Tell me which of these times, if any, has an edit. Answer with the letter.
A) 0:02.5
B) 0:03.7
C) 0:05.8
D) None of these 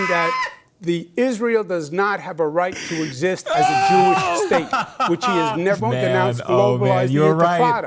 C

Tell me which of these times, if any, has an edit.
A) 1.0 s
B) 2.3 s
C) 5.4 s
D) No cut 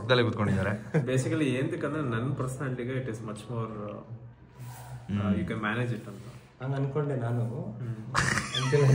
A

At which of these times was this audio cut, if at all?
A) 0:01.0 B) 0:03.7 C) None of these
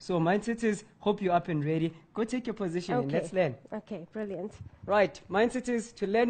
B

